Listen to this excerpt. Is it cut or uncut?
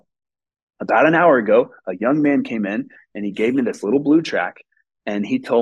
uncut